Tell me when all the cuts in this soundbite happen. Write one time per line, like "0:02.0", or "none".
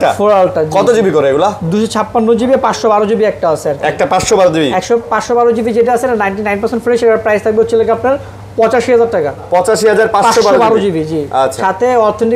none